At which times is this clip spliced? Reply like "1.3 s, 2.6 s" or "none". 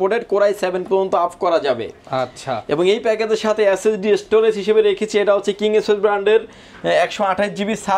none